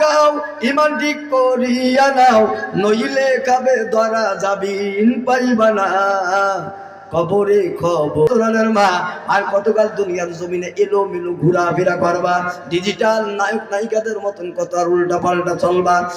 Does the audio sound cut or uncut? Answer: cut